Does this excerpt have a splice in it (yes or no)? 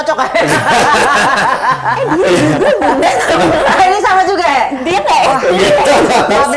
no